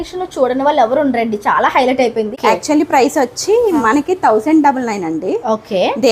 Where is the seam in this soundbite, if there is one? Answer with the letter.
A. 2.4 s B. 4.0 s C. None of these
A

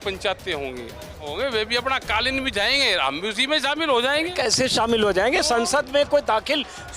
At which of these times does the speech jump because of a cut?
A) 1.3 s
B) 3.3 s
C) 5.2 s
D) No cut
A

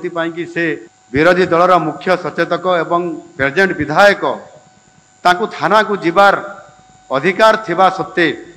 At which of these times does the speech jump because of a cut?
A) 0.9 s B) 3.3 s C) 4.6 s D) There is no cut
A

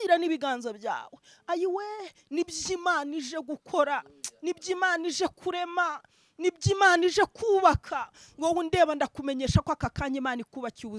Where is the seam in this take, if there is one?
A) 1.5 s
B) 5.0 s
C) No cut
C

